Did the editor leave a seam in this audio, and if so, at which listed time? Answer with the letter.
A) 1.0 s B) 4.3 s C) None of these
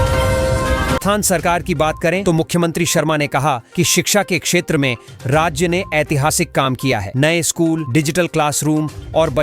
A